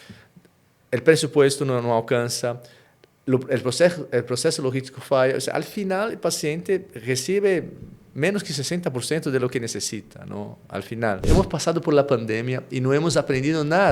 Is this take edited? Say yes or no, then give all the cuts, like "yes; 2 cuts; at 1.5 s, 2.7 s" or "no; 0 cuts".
yes; 1 cut; at 11.3 s